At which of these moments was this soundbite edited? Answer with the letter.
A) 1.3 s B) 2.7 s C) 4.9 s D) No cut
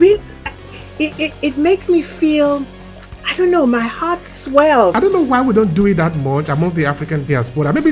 C